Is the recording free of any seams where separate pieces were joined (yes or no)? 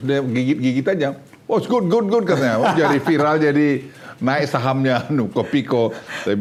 yes